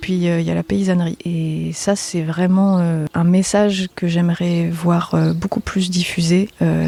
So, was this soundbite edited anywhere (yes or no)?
no